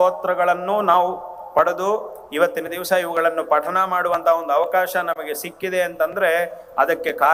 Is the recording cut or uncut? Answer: uncut